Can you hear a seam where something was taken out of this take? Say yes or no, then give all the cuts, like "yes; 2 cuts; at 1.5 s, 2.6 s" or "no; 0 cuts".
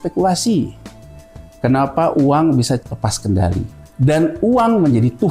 yes; 2 cuts; at 2.8 s, 3.8 s